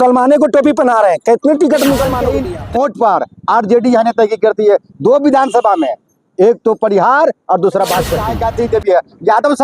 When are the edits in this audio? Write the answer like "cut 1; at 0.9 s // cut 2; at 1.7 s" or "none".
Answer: cut 1; at 2.5 s // cut 2; at 8.3 s